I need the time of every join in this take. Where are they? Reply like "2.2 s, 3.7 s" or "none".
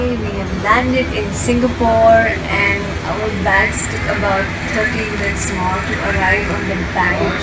none